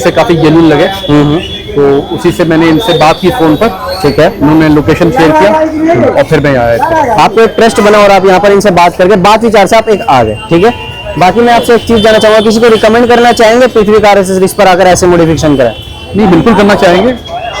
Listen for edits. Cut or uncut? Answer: uncut